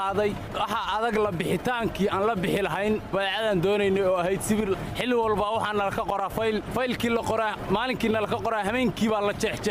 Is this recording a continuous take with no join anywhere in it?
no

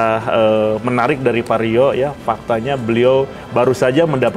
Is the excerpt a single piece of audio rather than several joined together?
yes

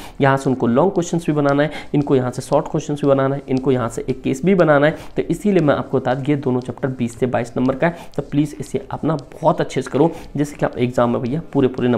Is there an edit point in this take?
no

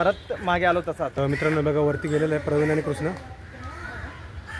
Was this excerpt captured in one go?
no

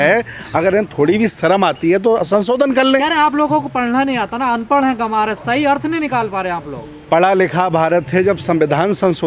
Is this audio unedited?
yes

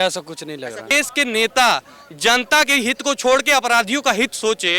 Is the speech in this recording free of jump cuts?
no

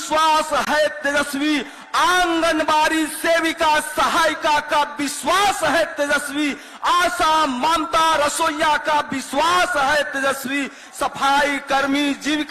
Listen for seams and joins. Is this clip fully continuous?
yes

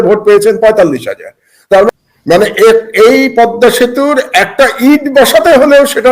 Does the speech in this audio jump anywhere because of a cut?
yes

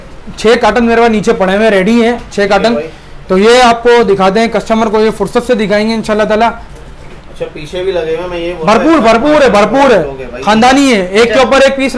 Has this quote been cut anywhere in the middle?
no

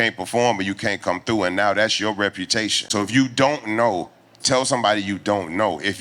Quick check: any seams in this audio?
yes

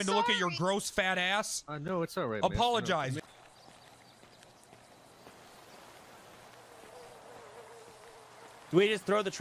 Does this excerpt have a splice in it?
yes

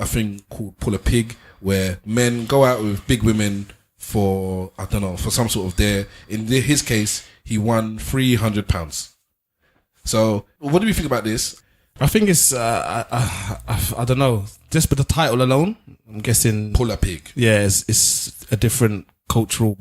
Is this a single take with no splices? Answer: no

